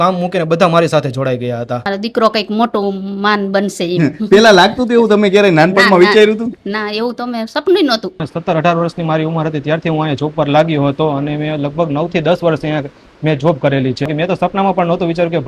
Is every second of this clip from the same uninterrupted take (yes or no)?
no